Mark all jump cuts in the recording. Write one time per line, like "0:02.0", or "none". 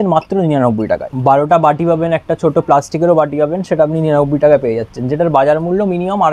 0:01.1